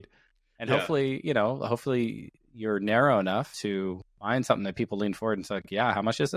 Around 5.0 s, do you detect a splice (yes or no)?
no